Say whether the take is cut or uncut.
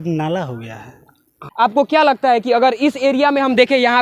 cut